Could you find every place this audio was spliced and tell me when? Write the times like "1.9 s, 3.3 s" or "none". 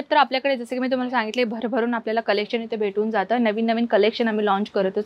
none